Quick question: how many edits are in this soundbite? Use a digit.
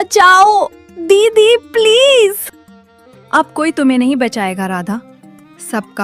0